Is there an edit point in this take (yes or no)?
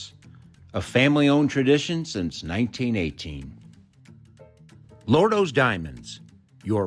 yes